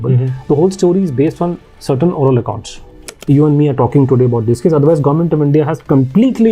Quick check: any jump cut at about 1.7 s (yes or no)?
no